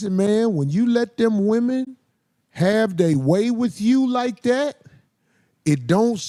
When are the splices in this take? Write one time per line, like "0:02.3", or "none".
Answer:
none